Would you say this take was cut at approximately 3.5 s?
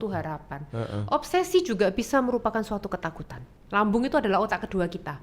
yes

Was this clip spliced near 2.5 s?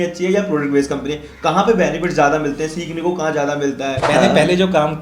no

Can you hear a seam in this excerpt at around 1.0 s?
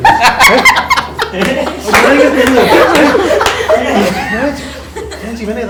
no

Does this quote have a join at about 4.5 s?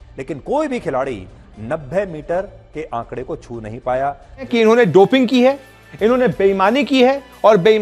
yes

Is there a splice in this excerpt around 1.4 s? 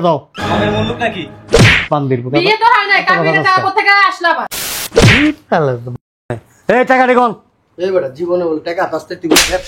no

